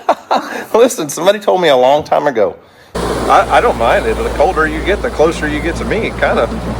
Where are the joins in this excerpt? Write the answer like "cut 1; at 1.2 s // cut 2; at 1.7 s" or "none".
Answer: cut 1; at 3.0 s